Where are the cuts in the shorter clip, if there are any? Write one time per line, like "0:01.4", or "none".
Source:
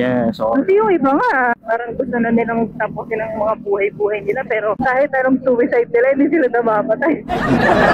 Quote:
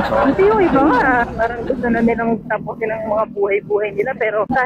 none